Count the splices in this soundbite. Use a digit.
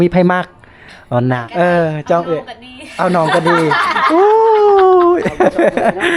1